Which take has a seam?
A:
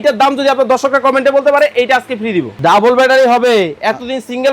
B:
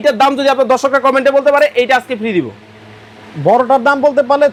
A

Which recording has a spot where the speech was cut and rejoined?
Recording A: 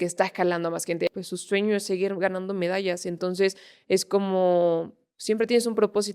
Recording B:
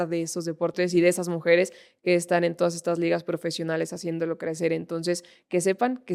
A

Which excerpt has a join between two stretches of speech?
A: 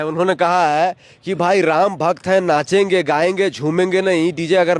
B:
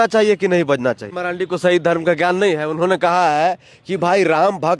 B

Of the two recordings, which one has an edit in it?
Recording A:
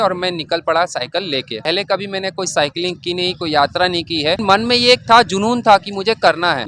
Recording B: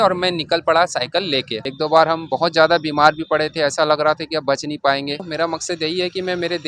B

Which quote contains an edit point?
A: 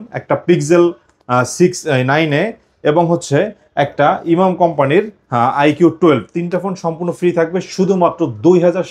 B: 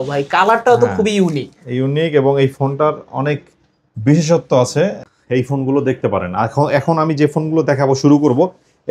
B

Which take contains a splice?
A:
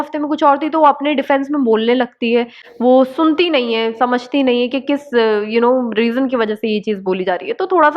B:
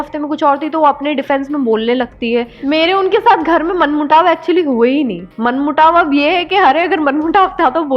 B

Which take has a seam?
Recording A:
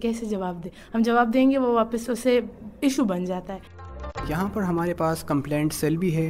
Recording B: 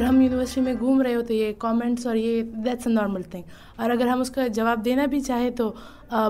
A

